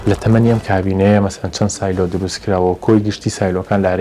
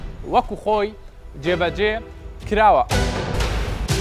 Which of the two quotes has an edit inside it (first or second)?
second